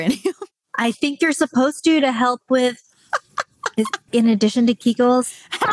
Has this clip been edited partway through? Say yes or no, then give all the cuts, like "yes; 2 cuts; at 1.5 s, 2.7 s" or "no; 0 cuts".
yes; 1 cut; at 4.1 s